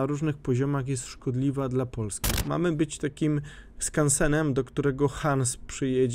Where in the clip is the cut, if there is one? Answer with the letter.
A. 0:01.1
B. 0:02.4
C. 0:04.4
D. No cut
B